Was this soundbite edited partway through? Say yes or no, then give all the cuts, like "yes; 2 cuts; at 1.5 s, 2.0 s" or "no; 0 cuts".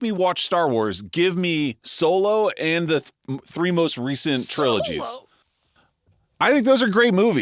no; 0 cuts